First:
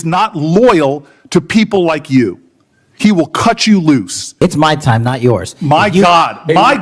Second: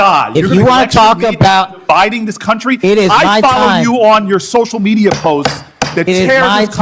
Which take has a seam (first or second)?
first